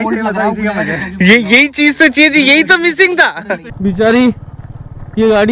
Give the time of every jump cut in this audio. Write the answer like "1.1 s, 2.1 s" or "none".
3.6 s